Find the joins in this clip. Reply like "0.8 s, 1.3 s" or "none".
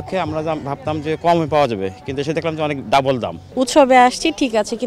3.4 s

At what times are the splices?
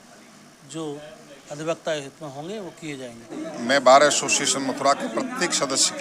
3.4 s

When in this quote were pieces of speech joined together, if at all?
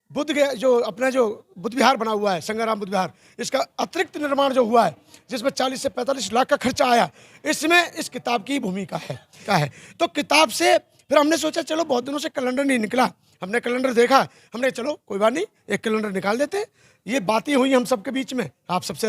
9.4 s

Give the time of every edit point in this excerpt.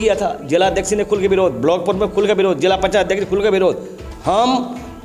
none

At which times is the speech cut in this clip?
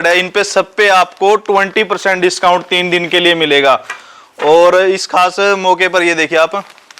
none

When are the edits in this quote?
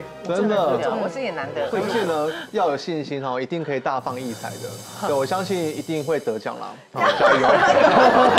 1.8 s

